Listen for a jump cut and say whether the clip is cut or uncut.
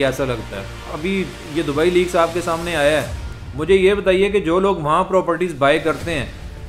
cut